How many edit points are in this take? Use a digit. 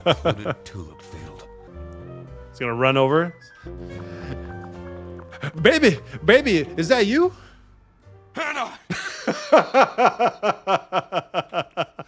1